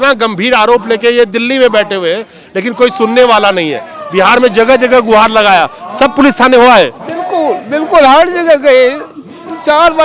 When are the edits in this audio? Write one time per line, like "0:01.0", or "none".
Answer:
none